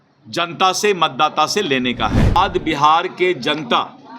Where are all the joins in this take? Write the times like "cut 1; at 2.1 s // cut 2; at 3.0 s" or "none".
cut 1; at 2.4 s